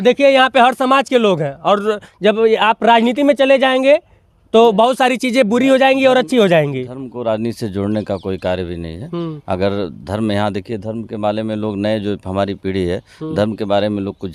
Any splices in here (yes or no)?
no